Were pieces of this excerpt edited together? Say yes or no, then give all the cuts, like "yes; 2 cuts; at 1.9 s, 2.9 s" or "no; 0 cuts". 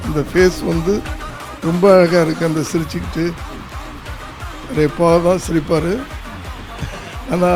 no; 0 cuts